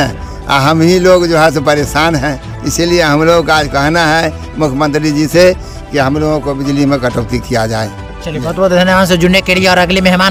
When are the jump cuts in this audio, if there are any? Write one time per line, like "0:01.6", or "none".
none